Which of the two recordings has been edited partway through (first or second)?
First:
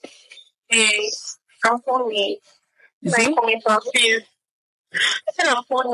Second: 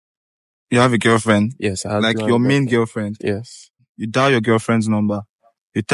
second